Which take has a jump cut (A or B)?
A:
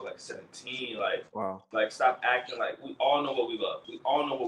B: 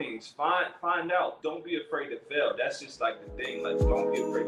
A